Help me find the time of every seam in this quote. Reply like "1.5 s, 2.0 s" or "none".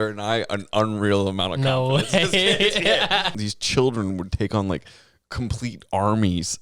3.4 s